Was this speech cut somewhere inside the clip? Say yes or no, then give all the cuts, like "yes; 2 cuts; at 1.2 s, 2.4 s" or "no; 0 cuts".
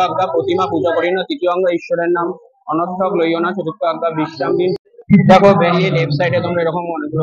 yes; 1 cut; at 4.8 s